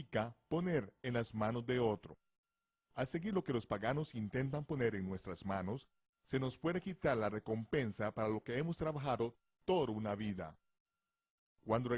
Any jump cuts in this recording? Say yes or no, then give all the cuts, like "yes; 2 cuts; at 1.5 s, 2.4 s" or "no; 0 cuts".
yes; 1 cut; at 1.9 s